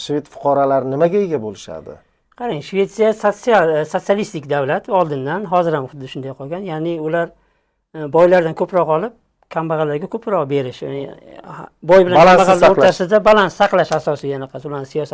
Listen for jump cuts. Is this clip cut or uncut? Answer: uncut